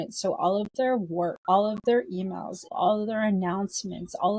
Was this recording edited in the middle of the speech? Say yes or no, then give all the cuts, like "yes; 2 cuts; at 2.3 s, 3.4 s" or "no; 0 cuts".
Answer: yes; 2 cuts; at 1.4 s, 2.6 s